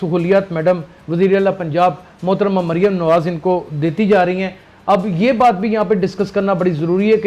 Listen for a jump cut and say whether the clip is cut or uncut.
uncut